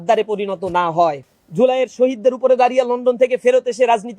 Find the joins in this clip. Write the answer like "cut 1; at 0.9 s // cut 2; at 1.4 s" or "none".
cut 1; at 1.3 s